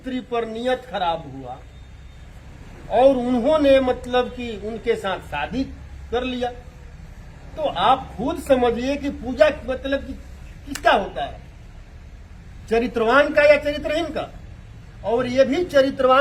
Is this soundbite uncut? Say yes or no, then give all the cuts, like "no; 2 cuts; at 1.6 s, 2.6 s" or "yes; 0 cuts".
yes; 0 cuts